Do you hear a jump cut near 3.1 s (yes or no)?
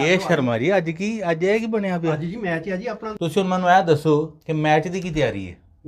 yes